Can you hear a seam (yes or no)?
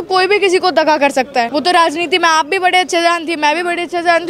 yes